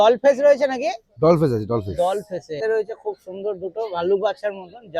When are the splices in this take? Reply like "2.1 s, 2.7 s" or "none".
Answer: 2.5 s